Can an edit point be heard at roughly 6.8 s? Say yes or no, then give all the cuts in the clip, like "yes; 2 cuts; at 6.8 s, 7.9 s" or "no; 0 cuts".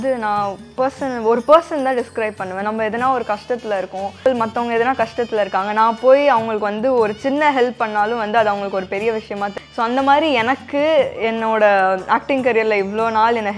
no; 2 cuts; at 4.2 s, 9.5 s